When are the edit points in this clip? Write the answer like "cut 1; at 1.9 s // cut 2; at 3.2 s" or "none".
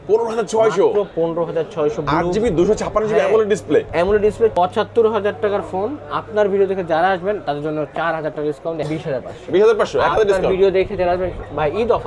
cut 1; at 4.5 s // cut 2; at 8.9 s